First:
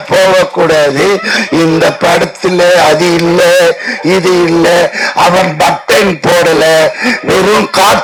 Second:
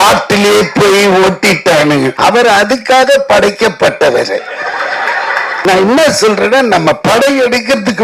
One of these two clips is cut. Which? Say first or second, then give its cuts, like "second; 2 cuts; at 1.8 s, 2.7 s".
second; 2 cuts; at 2.1 s, 5.5 s